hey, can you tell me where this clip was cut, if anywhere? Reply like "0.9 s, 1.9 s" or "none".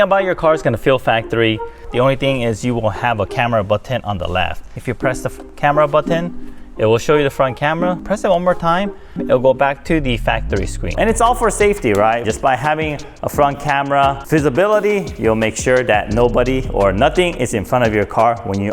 1.9 s, 4.8 s, 8.0 s, 10.9 s